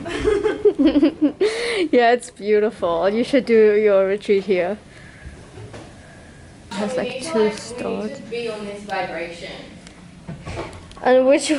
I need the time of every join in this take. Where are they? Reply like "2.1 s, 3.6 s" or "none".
none